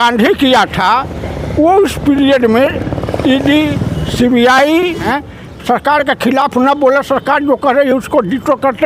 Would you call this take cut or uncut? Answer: cut